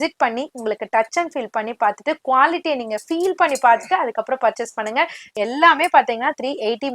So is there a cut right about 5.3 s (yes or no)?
yes